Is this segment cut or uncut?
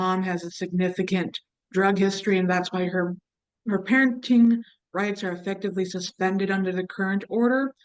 uncut